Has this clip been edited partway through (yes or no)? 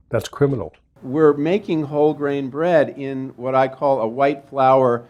yes